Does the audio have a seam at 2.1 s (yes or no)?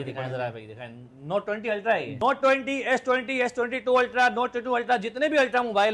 yes